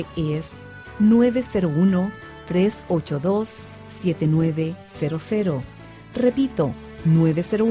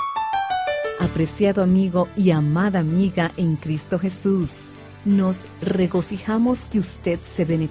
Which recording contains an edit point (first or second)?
second